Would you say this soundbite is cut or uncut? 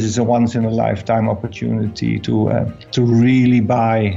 cut